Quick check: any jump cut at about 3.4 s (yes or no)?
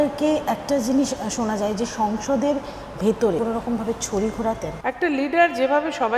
yes